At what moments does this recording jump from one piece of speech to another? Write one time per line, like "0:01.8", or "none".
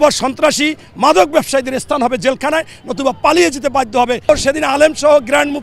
0:04.3

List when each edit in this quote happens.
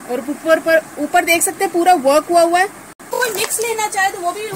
0:03.1

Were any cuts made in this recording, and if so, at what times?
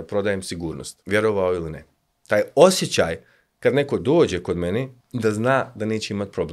0:00.9
0:05.0

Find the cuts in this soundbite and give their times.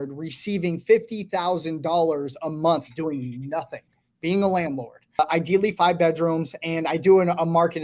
0:05.2

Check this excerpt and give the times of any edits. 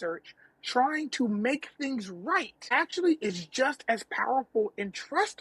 0:02.7

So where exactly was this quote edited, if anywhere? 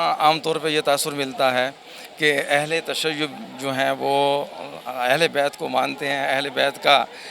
none

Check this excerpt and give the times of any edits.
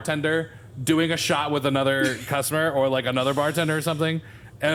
none

